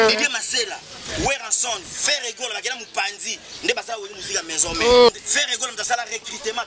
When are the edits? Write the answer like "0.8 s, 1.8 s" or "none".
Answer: 5.1 s